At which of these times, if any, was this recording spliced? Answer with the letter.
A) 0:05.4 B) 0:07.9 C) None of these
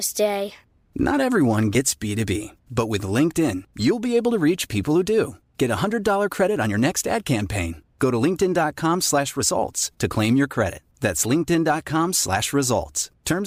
C